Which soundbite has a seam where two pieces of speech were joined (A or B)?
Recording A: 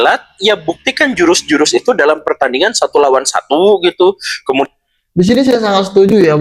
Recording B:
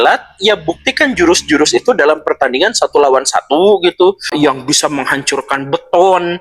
B